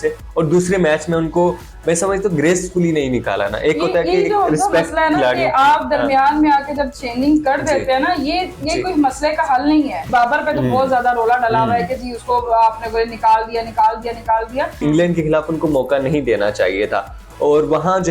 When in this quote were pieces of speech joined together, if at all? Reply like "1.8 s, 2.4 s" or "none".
10.0 s, 14.7 s